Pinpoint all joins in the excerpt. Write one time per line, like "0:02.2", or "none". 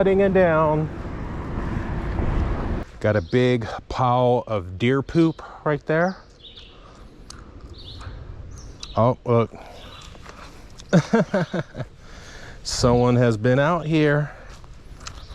0:02.9